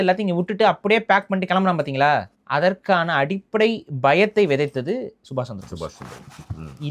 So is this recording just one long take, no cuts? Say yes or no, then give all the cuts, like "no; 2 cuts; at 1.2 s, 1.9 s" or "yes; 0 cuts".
no; 1 cut; at 2.4 s